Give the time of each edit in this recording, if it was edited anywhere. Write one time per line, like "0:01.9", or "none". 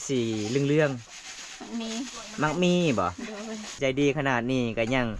0:03.8